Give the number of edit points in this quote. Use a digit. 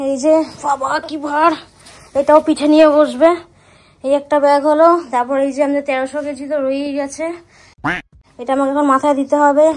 0